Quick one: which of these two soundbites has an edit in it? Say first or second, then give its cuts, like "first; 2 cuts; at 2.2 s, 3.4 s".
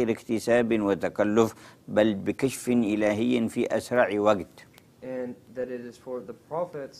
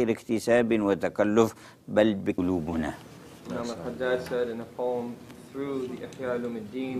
first; 1 cut; at 2.4 s